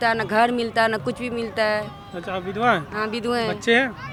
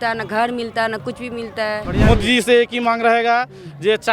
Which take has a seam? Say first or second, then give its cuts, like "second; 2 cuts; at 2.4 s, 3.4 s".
second; 1 cut; at 1.9 s